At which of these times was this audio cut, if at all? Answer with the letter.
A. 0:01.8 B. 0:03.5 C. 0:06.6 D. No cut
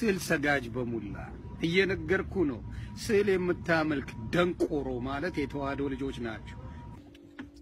D